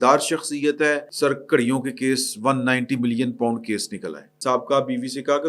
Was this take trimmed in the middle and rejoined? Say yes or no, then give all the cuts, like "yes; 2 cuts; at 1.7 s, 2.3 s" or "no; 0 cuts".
yes; 2 cuts; at 1.1 s, 4.3 s